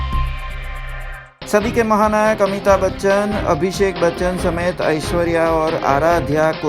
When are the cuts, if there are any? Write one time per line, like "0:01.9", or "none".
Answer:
0:01.0